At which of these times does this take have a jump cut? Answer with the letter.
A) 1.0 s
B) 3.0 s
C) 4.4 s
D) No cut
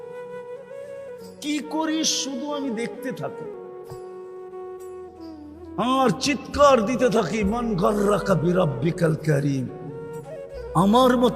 A